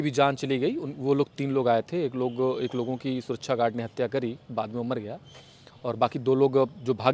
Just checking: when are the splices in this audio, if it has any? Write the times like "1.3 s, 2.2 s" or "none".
none